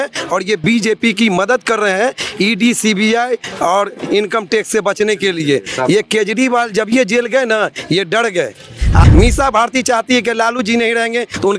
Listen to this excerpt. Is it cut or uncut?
cut